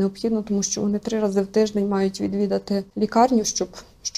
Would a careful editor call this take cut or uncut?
cut